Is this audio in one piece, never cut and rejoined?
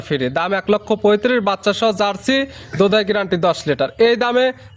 yes; 0 cuts

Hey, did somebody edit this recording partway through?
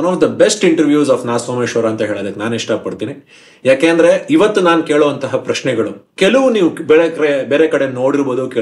yes; 1 cut; at 6.0 s

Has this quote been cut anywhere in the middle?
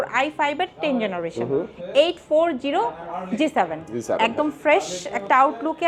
no; 0 cuts

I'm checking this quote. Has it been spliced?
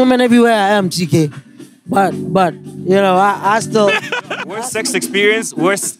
yes; 1 cut; at 4.6 s

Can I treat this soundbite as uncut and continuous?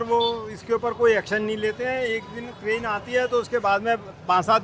yes; 0 cuts

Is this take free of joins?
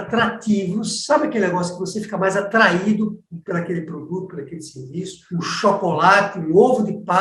no; 1 cut; at 5.2 s

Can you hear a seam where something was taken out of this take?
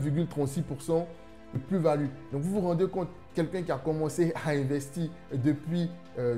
yes; 1 cut; at 1.5 s

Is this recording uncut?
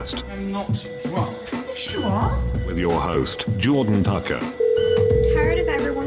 yes; 0 cuts

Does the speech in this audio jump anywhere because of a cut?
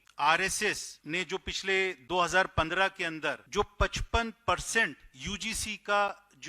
yes; 2 cuts; at 0.9 s, 3.4 s

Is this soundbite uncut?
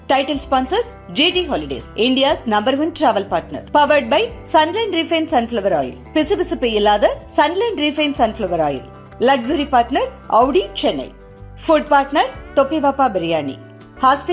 yes; 0 cuts

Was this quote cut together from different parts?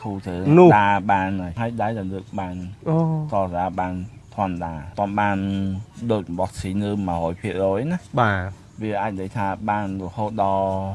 no; 0 cuts

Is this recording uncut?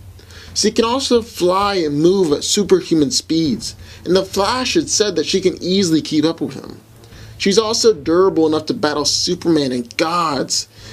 no; 1 cut; at 5.4 s

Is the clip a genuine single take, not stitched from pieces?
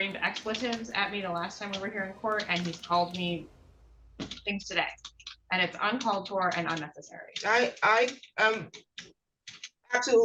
yes; 0 cuts

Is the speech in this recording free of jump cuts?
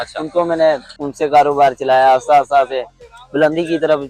no; 1 cut; at 1.0 s

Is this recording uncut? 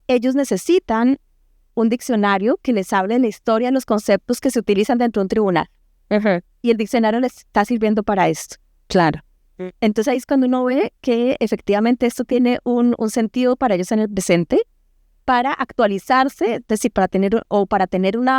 yes; 0 cuts

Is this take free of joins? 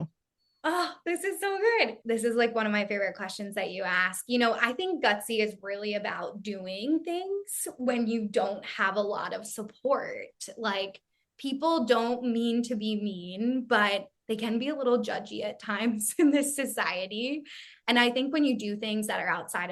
no; 1 cut; at 2.0 s

